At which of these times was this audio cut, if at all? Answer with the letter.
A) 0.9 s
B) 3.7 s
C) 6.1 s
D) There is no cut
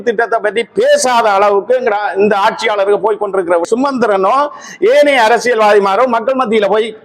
B